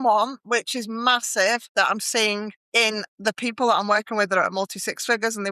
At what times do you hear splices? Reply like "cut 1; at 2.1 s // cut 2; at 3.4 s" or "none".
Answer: cut 1; at 1.7 s // cut 2; at 2.6 s